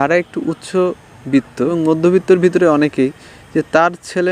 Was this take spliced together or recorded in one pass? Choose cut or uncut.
cut